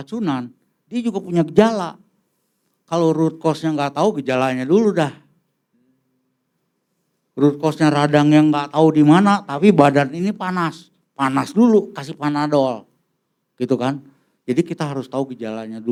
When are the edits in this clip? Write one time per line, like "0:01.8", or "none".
none